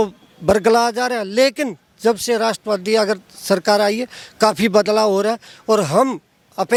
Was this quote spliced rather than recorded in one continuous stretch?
no; 0 cuts

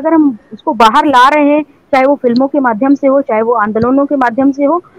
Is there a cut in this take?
no; 0 cuts

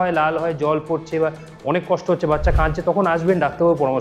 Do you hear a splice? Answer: no; 0 cuts

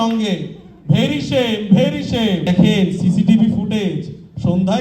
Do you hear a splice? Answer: yes; 1 cut; at 2.5 s

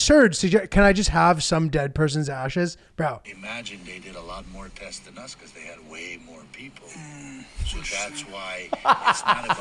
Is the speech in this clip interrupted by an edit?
yes; 1 cut; at 3.3 s

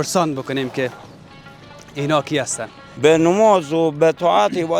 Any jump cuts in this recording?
yes; 1 cut; at 2.8 s

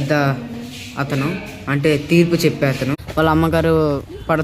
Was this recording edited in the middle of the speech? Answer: yes; 1 cut; at 3.0 s

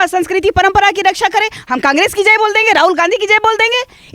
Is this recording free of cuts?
yes; 0 cuts

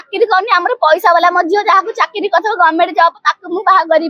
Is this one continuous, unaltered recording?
yes; 0 cuts

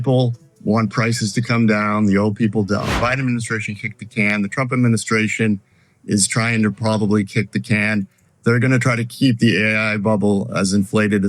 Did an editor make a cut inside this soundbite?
yes; 1 cut; at 2.9 s

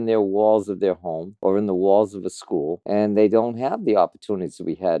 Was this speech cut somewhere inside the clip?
no; 0 cuts

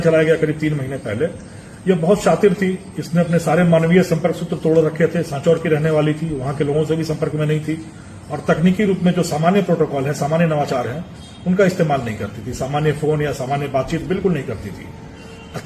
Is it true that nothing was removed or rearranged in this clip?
yes; 0 cuts

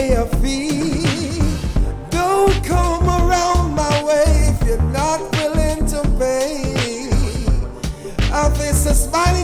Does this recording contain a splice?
yes; 1 cut; at 2.7 s

